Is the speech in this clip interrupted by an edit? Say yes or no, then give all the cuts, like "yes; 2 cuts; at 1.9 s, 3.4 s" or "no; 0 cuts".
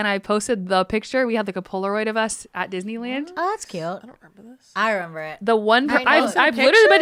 no; 0 cuts